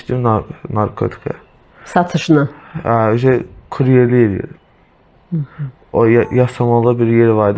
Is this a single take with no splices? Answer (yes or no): yes